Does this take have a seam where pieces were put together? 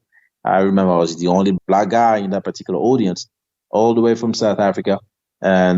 yes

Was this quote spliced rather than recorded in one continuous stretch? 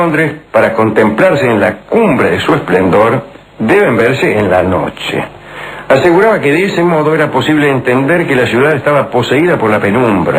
no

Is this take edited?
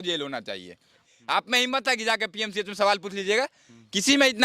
yes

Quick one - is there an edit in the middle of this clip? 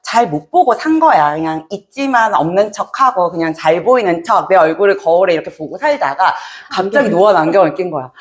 no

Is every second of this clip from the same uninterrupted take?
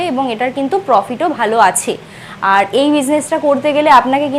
yes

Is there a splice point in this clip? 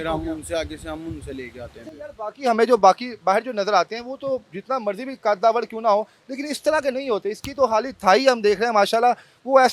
no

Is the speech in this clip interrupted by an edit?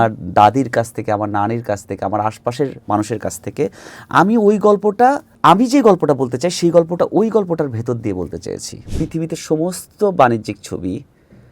yes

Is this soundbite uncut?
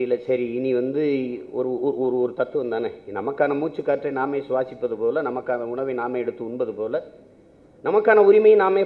yes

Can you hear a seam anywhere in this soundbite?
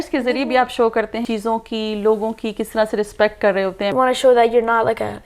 yes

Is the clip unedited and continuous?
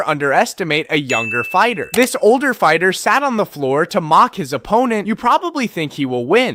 yes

